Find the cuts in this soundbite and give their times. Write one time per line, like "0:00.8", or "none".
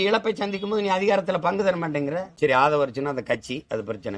0:02.3